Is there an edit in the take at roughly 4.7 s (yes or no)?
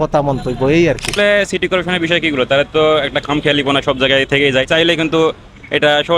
yes